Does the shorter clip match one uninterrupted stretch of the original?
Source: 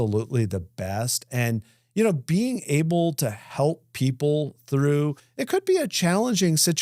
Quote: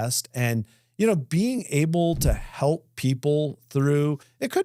yes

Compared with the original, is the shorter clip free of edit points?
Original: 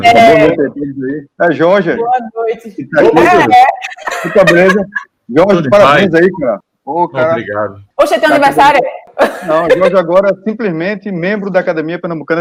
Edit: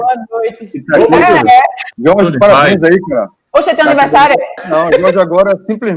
no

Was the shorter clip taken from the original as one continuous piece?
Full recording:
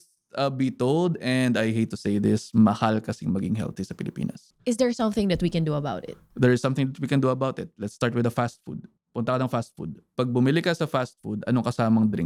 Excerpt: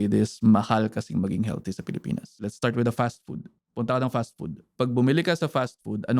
no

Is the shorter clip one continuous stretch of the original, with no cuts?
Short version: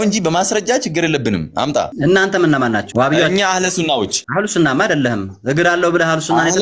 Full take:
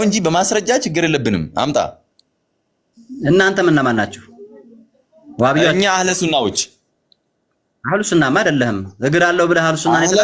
no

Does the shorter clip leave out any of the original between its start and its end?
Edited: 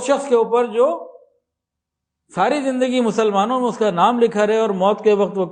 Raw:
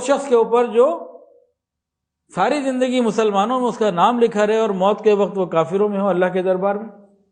no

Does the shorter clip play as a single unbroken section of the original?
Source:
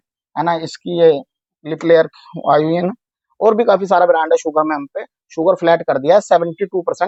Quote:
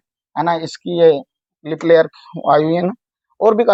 yes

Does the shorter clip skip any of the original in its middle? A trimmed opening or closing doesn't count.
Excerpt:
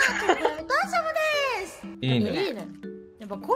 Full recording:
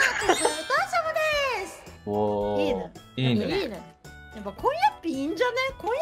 yes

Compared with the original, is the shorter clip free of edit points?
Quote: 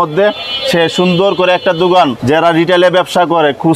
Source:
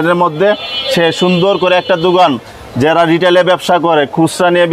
no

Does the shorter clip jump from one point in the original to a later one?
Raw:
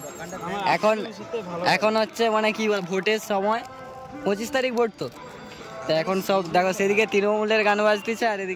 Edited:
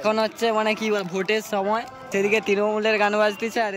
yes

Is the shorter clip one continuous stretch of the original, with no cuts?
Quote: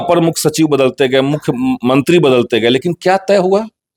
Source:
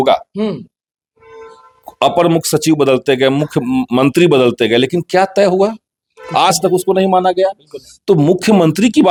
yes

